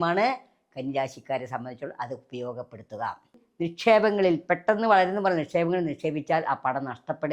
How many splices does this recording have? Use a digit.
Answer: 1